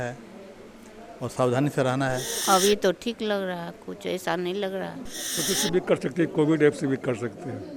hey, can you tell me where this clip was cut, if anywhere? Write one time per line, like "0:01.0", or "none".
0:02.3
0:05.4